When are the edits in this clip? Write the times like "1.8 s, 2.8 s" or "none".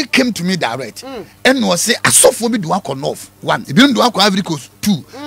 3.6 s